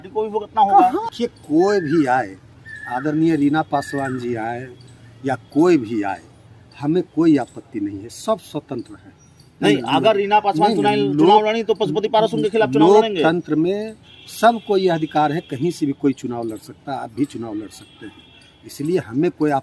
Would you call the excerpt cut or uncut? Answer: cut